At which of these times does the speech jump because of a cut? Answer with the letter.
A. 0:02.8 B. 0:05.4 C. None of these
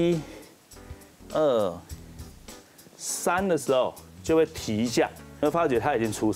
B